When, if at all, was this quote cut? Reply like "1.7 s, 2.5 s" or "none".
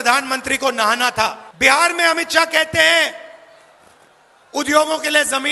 1.5 s